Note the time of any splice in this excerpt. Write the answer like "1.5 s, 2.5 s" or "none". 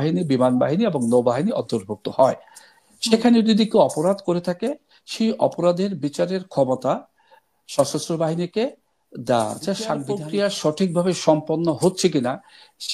10.1 s

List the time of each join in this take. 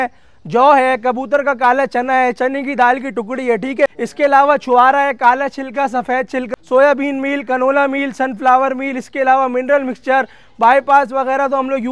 3.9 s, 6.5 s

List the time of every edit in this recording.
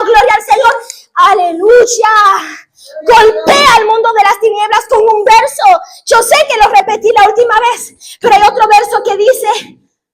none

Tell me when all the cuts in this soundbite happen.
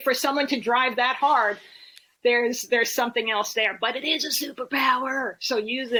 none

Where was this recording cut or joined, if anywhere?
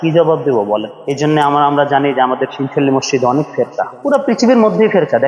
none

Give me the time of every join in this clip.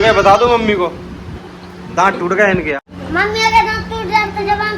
2.7 s

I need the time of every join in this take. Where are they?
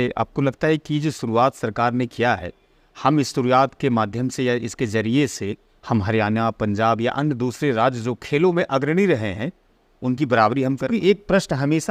10.8 s

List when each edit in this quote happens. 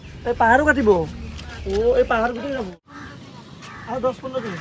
2.8 s

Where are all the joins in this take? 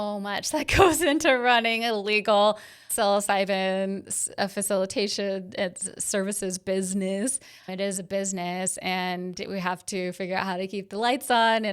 2.9 s, 7.7 s

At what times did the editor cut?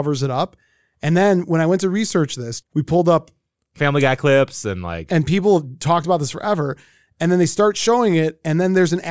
2.5 s

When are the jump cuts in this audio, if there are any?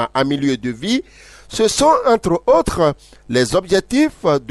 none

